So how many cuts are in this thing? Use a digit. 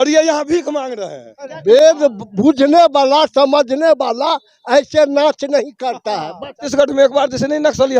2